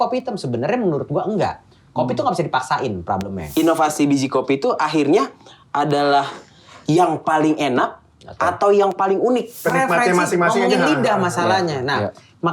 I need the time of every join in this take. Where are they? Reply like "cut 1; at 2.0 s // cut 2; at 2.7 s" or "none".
cut 1; at 3.4 s // cut 2; at 9.5 s